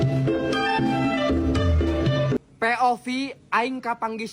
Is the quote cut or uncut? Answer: cut